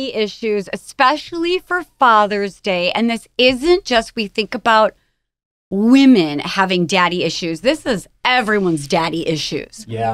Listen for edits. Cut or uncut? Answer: uncut